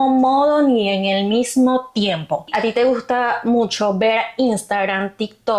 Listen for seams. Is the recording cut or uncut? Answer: cut